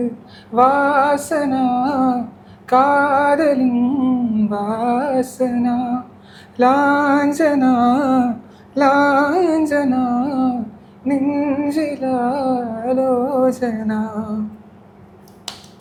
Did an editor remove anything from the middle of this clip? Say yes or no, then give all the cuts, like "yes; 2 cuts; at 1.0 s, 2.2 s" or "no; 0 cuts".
no; 0 cuts